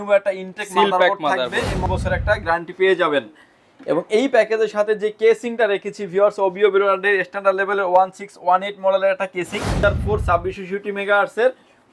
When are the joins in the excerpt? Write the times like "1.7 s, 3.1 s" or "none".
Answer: 1.9 s, 9.8 s